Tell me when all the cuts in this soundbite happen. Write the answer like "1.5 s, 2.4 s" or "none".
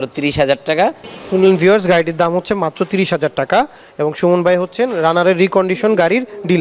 none